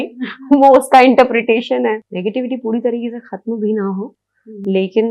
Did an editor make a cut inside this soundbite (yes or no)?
yes